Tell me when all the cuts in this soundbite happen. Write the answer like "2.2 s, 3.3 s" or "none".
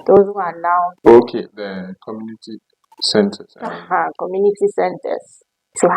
0.9 s